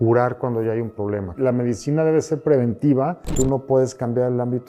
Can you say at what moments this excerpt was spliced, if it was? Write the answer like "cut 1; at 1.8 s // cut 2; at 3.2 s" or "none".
cut 1; at 1.4 s // cut 2; at 3.3 s